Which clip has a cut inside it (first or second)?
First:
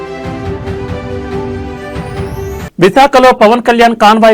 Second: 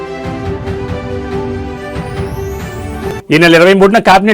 second